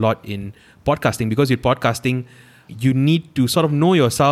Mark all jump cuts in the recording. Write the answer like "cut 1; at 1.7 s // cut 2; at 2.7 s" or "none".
cut 1; at 2.7 s